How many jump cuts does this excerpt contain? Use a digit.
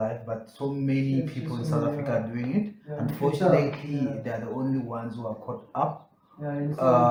0